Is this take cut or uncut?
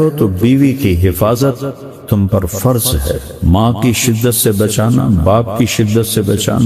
cut